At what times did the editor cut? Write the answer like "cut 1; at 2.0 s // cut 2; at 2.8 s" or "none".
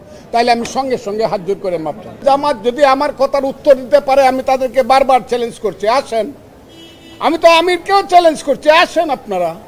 cut 1; at 2.2 s